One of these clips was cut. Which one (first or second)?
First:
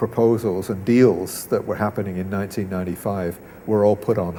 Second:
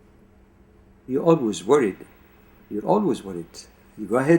second